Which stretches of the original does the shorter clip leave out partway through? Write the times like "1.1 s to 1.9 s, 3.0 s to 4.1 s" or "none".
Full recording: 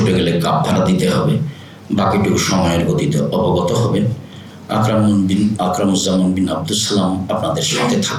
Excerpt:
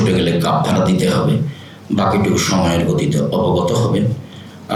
none

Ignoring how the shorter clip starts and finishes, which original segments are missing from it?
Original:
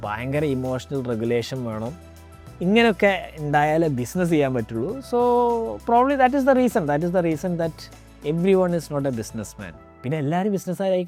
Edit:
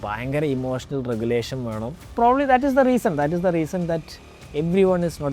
2.1 s to 5.8 s

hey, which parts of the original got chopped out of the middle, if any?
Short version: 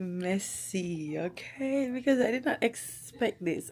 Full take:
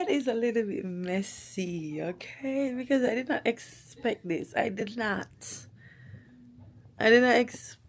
none

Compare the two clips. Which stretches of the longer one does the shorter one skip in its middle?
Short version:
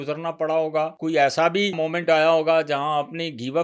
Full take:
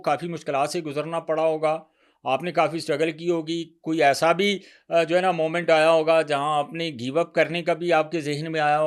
1.8 s to 3.8 s, 4.6 s to 5.4 s

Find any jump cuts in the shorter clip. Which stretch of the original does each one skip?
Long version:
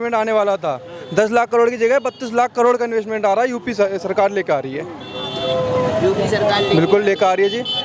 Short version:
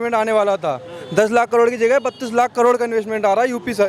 none

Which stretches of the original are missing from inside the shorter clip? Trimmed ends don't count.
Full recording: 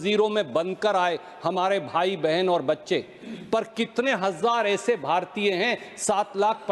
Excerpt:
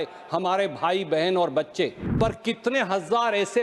3.1 s to 3.3 s

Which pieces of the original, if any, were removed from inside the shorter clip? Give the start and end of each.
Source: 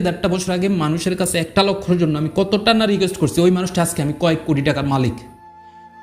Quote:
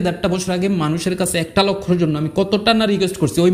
none

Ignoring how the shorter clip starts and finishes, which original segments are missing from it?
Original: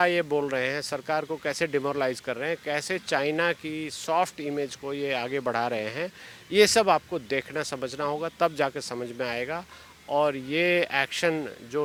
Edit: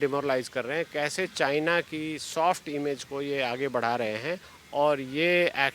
6.3 s to 9.9 s

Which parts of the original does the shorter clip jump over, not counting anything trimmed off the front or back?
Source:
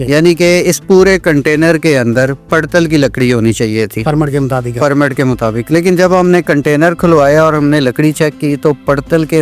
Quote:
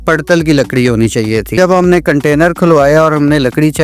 4.0 s to 6.0 s

